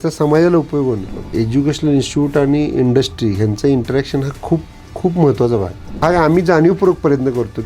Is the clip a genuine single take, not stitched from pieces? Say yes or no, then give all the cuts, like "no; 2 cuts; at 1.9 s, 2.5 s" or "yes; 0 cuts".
no; 2 cuts; at 1.2 s, 5.8 s